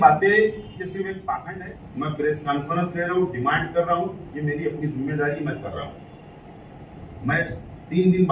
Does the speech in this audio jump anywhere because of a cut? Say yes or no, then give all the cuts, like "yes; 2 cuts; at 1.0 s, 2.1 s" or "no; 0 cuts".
yes; 1 cut; at 1.4 s